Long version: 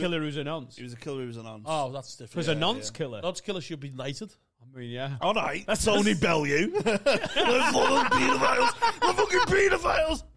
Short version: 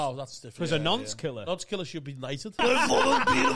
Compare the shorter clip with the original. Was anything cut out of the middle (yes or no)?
yes